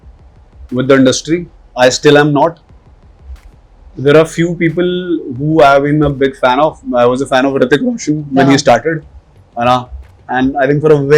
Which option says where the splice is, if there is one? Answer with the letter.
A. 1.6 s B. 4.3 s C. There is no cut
A